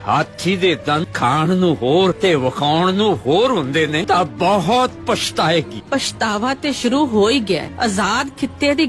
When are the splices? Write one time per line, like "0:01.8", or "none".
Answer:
0:01.1
0:02.2
0:04.0
0:05.8
0:07.7